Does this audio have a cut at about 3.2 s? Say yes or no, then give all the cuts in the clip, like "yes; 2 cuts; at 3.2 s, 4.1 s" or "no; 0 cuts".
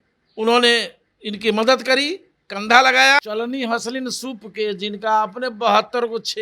yes; 1 cut; at 3.2 s